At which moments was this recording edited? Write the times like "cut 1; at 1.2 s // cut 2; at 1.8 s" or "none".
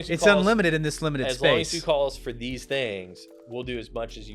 none